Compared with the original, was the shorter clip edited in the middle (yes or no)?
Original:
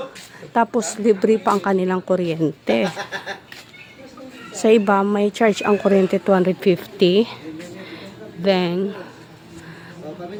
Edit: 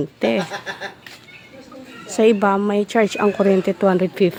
no